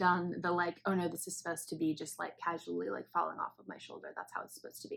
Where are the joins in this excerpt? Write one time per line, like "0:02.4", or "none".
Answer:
none